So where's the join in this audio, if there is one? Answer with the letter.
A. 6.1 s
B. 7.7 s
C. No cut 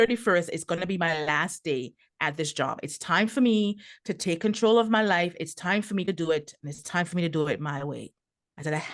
A